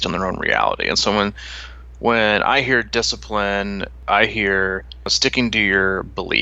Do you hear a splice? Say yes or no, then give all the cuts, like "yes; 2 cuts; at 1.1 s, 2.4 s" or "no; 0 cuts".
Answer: yes; 2 cuts; at 3.9 s, 5.1 s